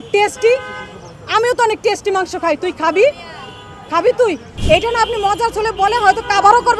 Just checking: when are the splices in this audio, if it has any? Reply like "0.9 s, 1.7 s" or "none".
4.5 s